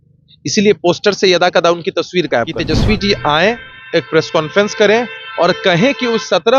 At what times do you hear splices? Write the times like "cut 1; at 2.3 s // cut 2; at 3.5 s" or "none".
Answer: cut 1; at 2.6 s